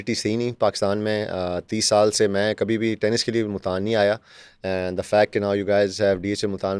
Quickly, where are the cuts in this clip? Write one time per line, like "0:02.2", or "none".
none